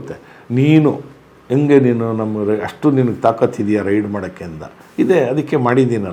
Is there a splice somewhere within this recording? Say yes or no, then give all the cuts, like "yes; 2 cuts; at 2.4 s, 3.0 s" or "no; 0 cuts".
no; 0 cuts